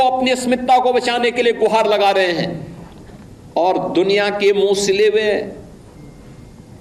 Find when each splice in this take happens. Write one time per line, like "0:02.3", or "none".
none

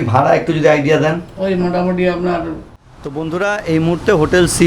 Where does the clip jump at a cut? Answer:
0:03.1

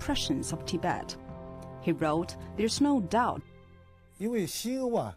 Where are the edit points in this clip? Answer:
none

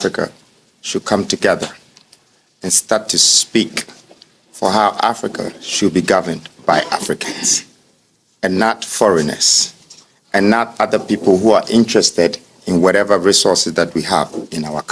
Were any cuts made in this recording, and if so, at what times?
none

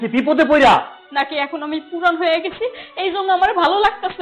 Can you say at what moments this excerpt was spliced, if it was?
0:01.0

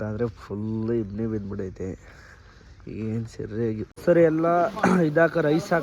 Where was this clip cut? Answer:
0:03.9

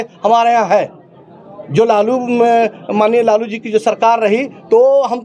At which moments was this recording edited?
none

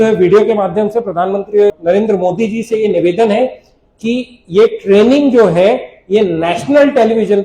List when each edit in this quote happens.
0:01.7

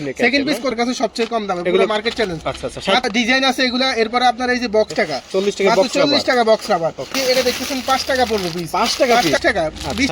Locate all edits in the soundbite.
0:00.7
0:03.1
0:04.9
0:07.1
0:09.4

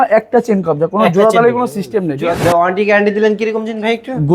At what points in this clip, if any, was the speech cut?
0:02.4

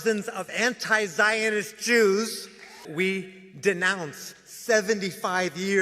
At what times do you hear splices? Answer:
0:02.9

